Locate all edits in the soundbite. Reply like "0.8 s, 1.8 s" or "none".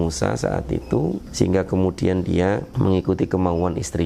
1.2 s, 2.7 s